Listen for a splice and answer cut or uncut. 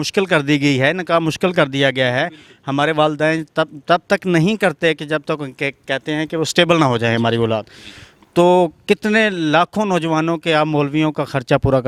uncut